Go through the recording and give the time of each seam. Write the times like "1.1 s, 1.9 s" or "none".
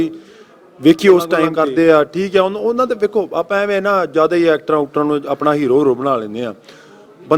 1.5 s

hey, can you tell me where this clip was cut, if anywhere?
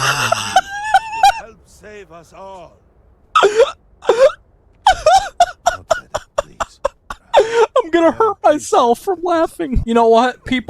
7.1 s, 9.8 s

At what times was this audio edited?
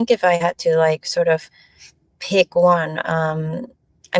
none

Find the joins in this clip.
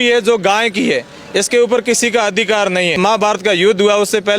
2.9 s

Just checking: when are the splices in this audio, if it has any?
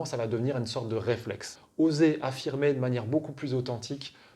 1.6 s

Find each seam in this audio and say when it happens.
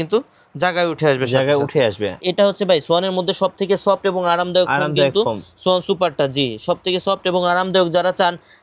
2.2 s

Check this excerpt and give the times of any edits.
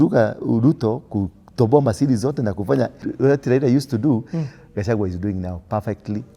3.1 s

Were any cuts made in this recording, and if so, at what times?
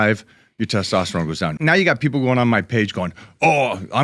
1.5 s

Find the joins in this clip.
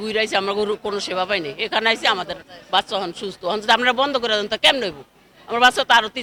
none

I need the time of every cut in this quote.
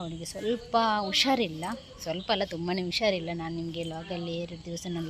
none

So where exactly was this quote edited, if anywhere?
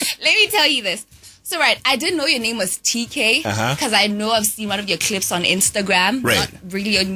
none

